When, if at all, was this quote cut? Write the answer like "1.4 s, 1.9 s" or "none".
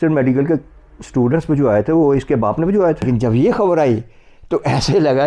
3.0 s